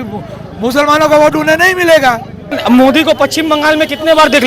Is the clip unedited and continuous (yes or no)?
no